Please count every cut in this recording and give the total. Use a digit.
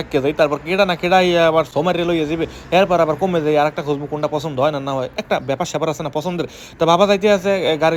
0